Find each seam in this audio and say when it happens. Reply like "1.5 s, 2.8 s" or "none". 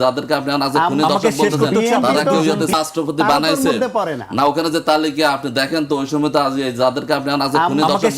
2.7 s